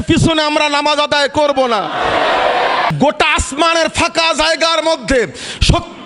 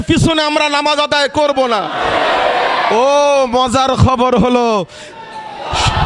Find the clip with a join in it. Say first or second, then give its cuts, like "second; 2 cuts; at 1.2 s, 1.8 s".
first; 1 cut; at 2.9 s